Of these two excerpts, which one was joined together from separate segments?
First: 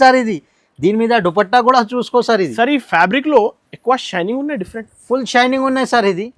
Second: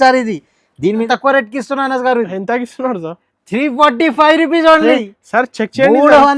second; 1 cut; at 1.1 s

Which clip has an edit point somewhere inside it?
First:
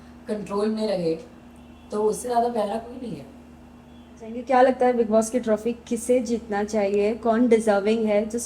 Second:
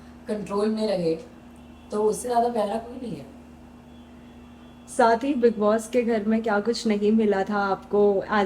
first; 1 cut; at 4.3 s

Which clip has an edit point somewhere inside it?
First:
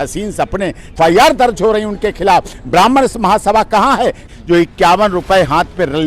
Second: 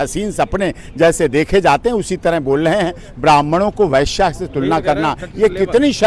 first; 2 cuts; at 0.9 s, 4.3 s

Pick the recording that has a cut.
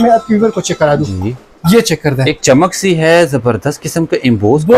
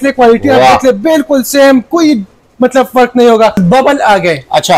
second; 1 cut; at 3.6 s

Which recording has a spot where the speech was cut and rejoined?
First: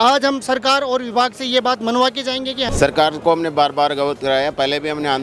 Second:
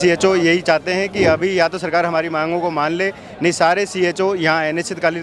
first; 1 cut; at 2.7 s

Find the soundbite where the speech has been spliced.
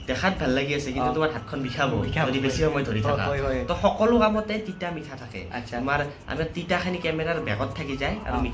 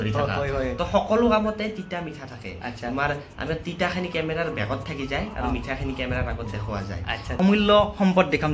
second; 1 cut; at 7.4 s

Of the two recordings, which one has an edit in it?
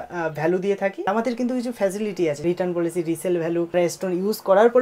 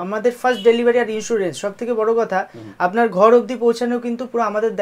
first; 3 cuts; at 1.1 s, 2.4 s, 3.7 s

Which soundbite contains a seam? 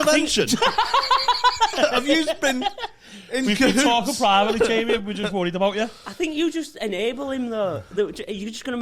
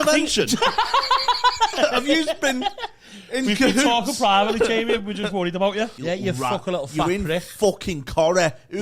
second; 1 cut; at 6.0 s

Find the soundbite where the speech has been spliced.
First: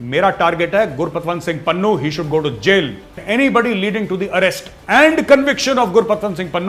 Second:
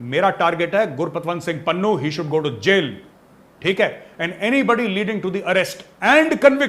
first; 1 cut; at 3.1 s

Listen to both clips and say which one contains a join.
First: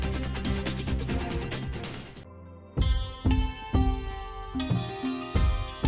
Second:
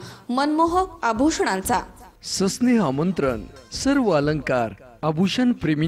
first; 1 cut; at 2.3 s

